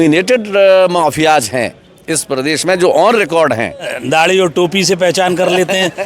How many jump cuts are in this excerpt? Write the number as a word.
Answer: one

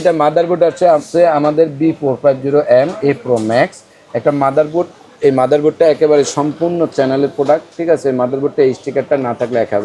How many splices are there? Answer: zero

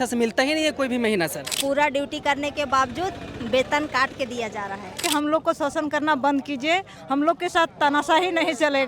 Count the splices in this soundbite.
two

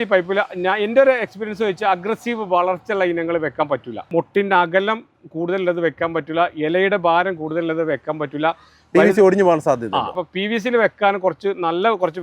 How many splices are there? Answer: two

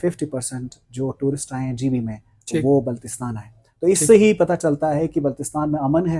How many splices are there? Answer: zero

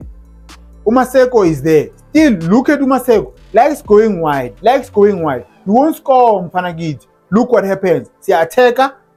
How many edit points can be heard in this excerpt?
zero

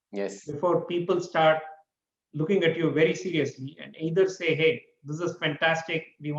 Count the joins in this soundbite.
zero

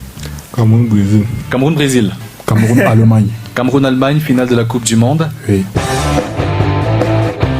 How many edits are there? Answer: two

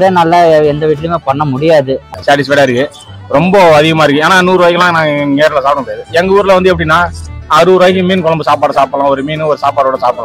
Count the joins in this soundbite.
one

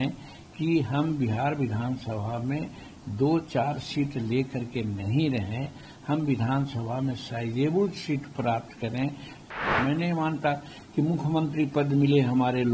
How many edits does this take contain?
one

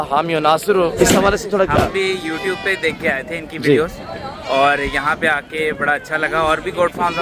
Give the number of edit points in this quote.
one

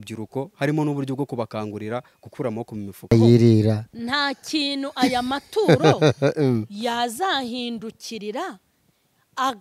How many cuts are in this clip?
one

